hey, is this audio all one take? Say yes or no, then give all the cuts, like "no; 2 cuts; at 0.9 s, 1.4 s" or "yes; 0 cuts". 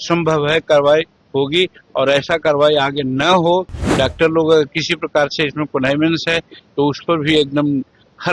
no; 1 cut; at 3.8 s